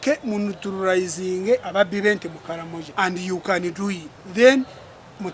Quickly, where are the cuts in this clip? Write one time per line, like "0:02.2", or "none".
0:01.7
0:02.8
0:04.1